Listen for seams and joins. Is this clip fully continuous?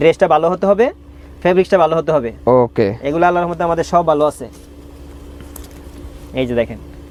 yes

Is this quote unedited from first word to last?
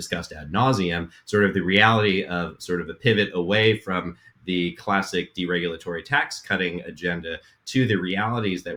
yes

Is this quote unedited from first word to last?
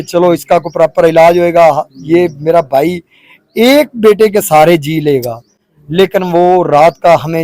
yes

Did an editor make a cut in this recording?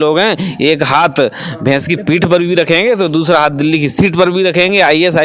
no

